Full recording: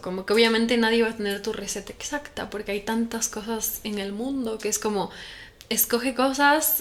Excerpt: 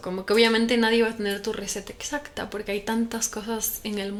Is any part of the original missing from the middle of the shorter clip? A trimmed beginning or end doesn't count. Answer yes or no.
no